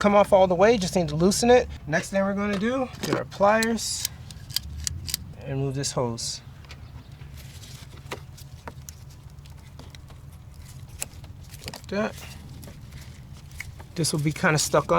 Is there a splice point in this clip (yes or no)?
yes